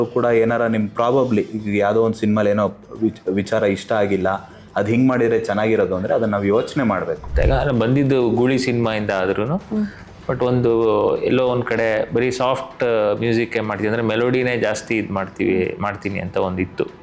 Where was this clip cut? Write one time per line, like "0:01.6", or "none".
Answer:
0:07.3